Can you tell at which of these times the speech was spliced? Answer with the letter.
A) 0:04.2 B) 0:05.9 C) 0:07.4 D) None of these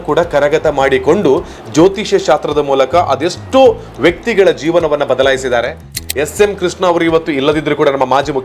B